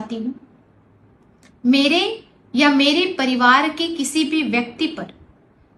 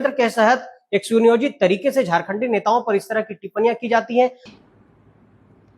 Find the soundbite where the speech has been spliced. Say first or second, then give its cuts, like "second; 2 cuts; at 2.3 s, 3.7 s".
second; 1 cut; at 4.4 s